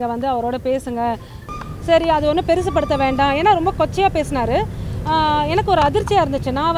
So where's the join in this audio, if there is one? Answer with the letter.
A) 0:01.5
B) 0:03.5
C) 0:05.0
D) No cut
A